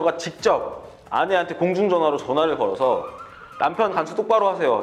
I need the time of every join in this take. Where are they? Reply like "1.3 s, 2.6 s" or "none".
none